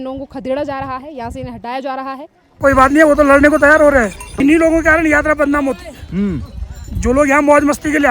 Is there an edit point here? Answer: yes; 2 cuts; at 2.5 s, 4.4 s

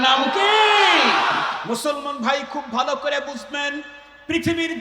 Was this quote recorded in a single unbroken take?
no; 1 cut; at 1.6 s

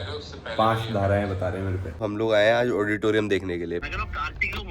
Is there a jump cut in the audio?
yes; 2 cuts; at 2.1 s, 3.8 s

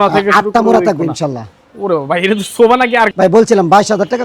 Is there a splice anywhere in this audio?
yes; 1 cut; at 3.1 s

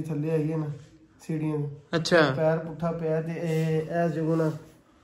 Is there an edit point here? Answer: no; 0 cuts

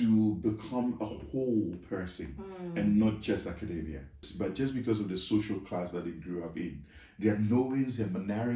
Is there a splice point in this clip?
yes; 1 cut; at 4.2 s

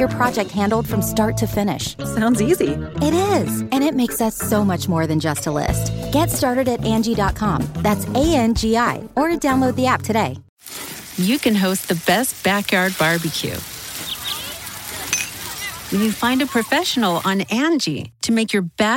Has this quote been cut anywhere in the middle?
yes; 1 cut; at 10.5 s

